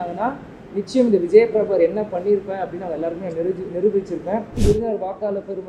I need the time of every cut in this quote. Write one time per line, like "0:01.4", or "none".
0:04.6